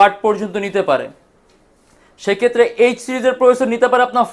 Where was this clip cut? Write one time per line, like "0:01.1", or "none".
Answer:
none